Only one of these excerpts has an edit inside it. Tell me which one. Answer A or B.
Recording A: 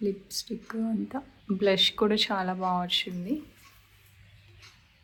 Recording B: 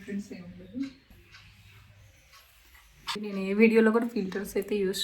B